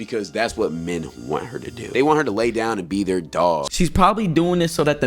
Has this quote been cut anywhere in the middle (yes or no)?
yes